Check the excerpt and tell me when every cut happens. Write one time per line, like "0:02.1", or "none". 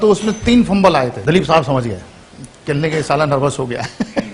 0:01.2

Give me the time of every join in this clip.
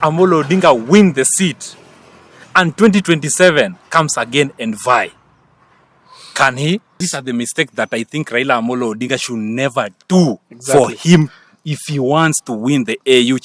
0:07.0

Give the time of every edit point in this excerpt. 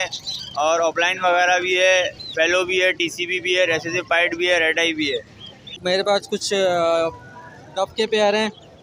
0:05.8

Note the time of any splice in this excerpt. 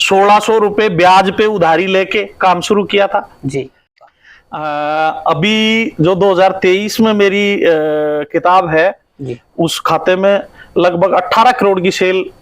0:04.0

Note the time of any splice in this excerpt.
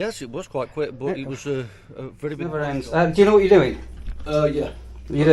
0:02.5

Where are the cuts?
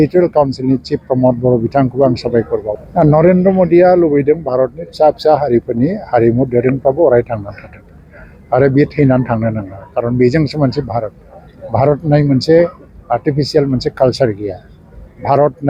0:02.8

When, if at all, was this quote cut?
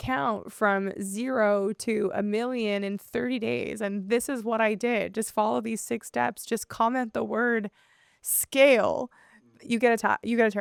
none

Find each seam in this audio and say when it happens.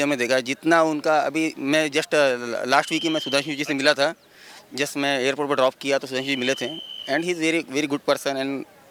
none

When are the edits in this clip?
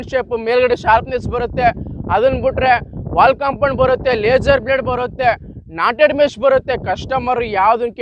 none

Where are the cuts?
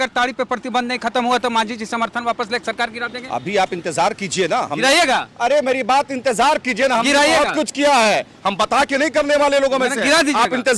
none

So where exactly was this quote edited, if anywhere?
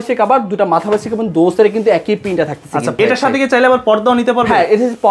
0:03.0

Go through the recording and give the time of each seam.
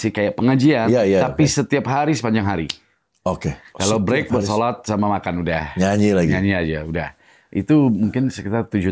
none

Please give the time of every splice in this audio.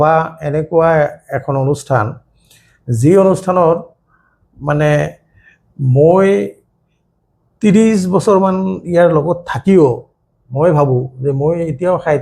none

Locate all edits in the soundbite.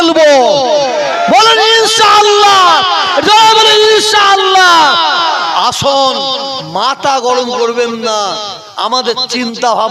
none

